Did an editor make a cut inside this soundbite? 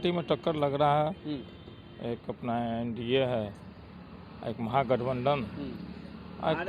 no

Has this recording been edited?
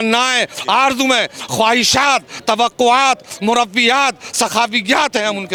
no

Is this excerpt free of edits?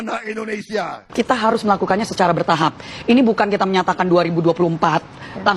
no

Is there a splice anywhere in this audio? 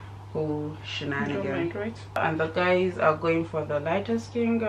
yes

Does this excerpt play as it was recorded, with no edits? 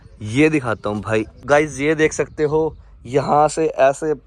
no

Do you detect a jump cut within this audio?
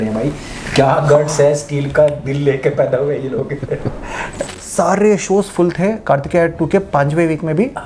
yes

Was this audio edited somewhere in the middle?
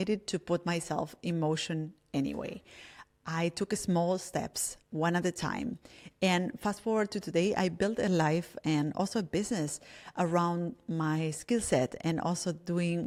no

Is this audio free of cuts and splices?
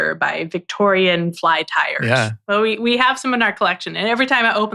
no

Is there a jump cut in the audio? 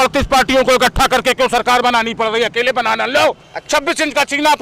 no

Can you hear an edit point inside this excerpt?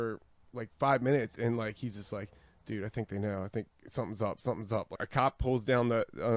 yes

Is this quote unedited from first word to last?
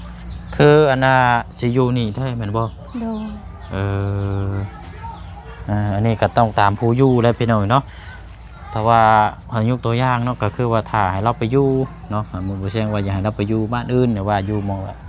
yes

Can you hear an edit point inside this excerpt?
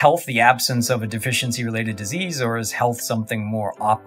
no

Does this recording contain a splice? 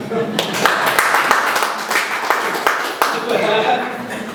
no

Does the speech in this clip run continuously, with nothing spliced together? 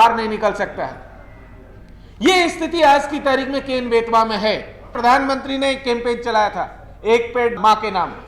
no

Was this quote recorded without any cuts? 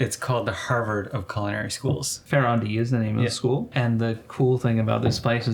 no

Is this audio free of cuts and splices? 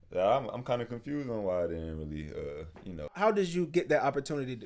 no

